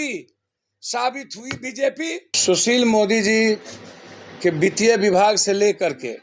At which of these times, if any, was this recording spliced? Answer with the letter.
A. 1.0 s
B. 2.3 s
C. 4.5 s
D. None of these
B